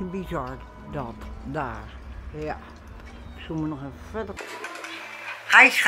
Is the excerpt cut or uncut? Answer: cut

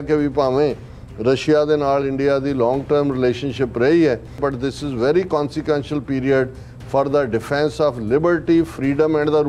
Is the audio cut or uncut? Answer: cut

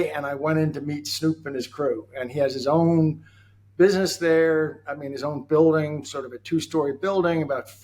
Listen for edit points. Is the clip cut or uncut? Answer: uncut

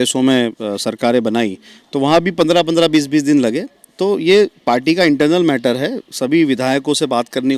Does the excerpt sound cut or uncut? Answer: uncut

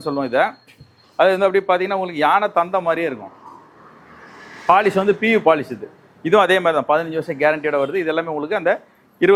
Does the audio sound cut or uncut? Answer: uncut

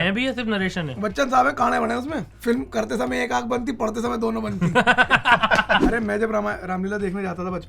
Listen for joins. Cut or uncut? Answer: cut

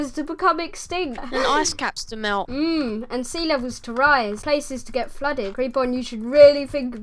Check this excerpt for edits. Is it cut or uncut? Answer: cut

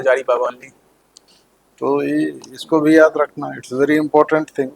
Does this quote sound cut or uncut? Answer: uncut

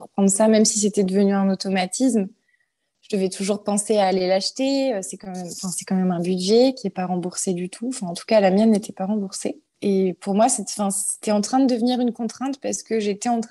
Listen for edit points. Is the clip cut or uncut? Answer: cut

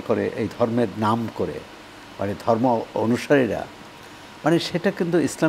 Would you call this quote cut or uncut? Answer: uncut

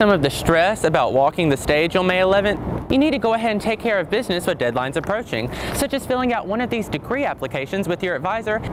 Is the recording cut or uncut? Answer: uncut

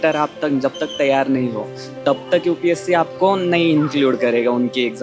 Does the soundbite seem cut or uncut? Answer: uncut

